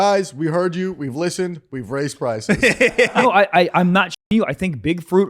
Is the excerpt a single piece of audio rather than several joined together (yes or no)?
no